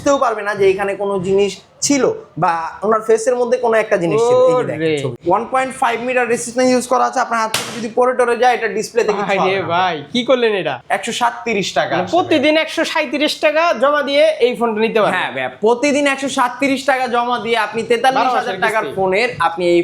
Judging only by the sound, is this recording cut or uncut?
cut